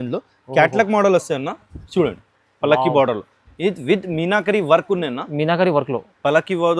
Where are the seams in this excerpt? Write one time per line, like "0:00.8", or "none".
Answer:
none